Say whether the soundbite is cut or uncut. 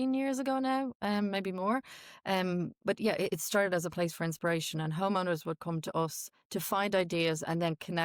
uncut